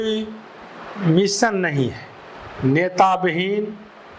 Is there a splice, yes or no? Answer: no